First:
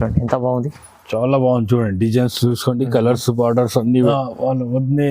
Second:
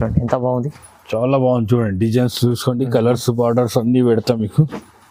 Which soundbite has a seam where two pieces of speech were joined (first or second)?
first